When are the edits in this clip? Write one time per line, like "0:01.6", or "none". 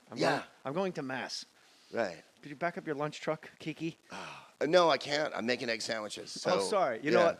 none